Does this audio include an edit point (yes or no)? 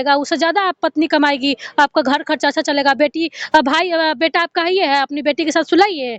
no